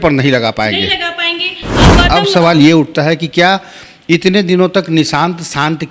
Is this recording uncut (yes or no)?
no